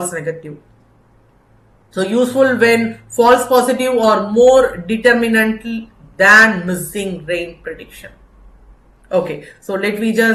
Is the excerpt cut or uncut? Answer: uncut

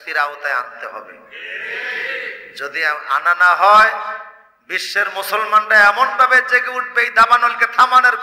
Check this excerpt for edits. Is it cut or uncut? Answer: uncut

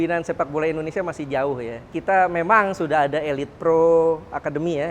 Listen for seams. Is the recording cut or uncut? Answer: cut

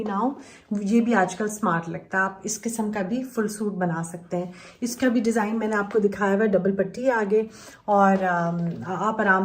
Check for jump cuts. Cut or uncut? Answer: uncut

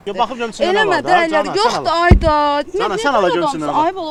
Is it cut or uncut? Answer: uncut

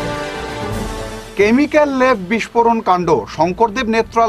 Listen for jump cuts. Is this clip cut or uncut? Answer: cut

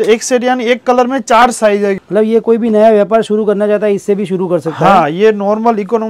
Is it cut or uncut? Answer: cut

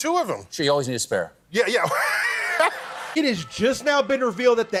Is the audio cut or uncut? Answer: uncut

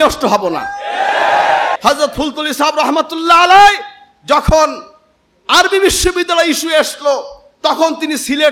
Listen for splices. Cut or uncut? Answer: cut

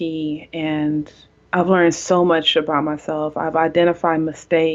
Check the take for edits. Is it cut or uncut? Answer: uncut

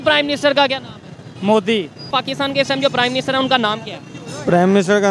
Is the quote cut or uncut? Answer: cut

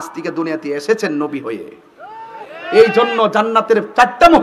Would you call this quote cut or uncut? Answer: uncut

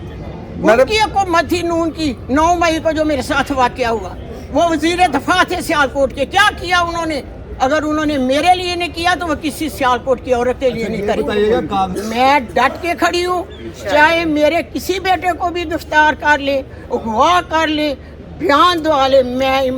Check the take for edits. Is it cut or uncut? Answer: cut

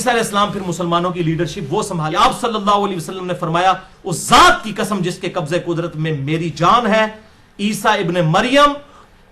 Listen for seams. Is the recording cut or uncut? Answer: cut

